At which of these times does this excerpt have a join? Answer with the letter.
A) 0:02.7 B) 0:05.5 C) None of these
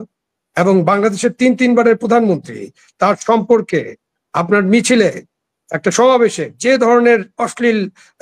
C